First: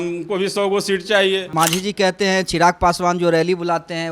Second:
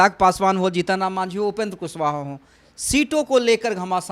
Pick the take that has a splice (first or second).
first